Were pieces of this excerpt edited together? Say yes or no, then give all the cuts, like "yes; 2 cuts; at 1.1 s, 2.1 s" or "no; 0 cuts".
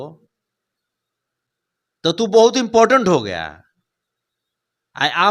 no; 0 cuts